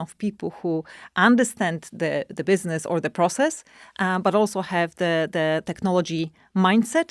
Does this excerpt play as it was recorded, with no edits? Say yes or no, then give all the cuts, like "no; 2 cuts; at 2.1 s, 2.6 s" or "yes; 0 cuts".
yes; 0 cuts